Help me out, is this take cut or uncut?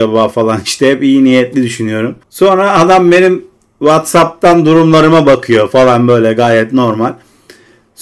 uncut